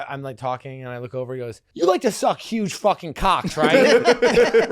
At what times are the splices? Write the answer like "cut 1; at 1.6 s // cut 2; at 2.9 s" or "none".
cut 1; at 1.6 s